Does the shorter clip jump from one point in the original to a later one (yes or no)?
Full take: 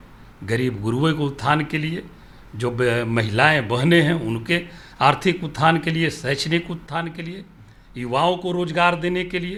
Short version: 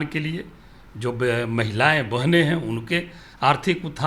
no